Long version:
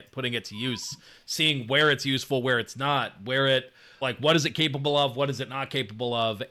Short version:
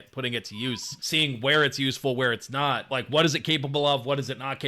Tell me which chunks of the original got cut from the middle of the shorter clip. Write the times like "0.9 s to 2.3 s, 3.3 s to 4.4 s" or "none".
0.9 s to 1.2 s, 3.1 s to 4.0 s